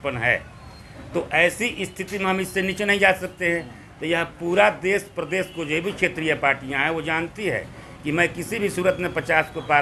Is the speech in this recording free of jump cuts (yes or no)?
yes